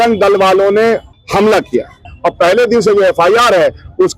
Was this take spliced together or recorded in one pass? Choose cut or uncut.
cut